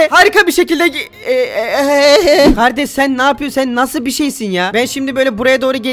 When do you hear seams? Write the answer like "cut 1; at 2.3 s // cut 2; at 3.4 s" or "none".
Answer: cut 1; at 2.5 s